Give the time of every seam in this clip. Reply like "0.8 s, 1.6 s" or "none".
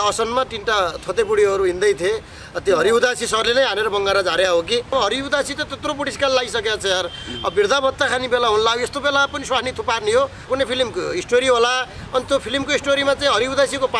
4.9 s, 8.0 s, 10.4 s

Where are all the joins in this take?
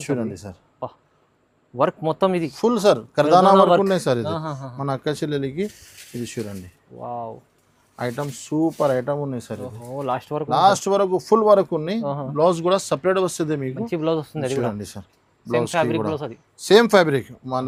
none

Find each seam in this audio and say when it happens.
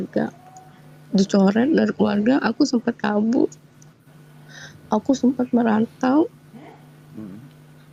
none

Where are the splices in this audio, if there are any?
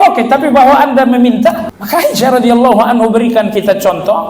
1.7 s

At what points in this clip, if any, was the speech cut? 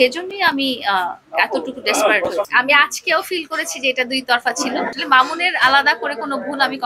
2.4 s, 4.9 s

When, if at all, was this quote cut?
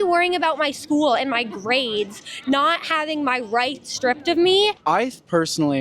4.8 s

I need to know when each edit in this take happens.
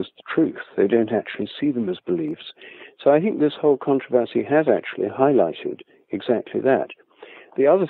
none

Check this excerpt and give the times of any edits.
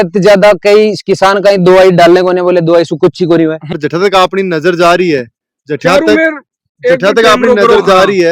3.8 s

